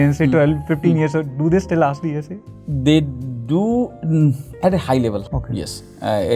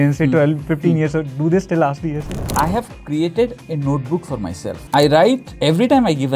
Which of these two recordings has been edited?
second; 3 cuts; at 2.4 s, 4.7 s, 5.5 s

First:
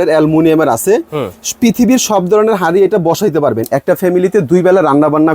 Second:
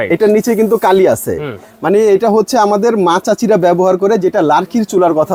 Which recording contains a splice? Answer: first; 1 cut; at 3.6 s

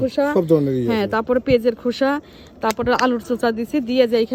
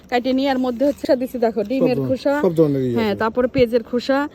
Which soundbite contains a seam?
second; 1 cut; at 1.0 s

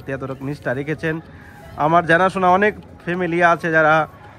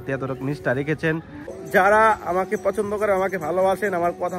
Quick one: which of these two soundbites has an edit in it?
second; 1 cut; at 1.6 s

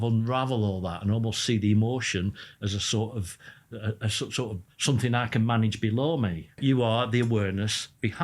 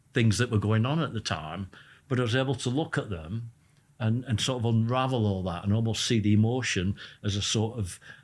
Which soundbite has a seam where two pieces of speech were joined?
first; 1 cut; at 6.6 s

